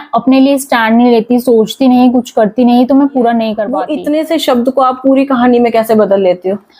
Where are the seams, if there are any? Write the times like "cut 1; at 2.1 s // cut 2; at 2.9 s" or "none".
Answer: cut 1; at 3.7 s